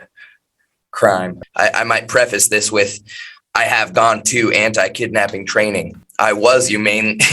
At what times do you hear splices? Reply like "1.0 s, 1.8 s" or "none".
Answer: 1.4 s, 6.0 s